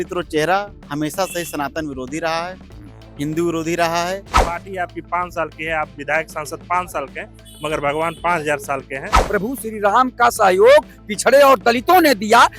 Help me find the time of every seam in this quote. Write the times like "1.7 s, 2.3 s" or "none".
4.3 s, 9.1 s